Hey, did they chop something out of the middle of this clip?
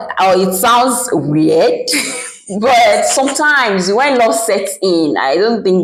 no; 0 cuts

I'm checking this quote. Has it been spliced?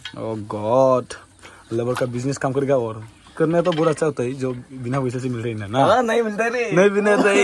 no; 0 cuts

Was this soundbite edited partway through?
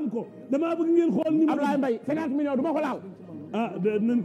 no; 0 cuts

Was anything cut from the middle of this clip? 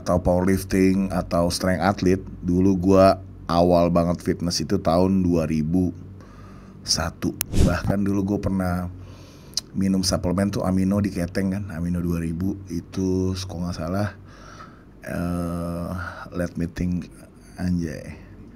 yes; 1 cut; at 7.5 s

